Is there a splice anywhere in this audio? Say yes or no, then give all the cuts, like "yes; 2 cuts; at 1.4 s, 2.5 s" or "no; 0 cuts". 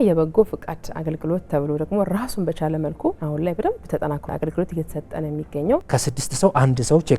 yes; 3 cuts; at 3.2 s, 4.2 s, 5.9 s